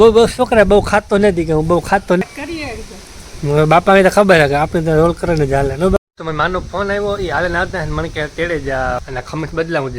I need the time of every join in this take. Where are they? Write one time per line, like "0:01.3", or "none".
0:02.2
0:06.0
0:09.0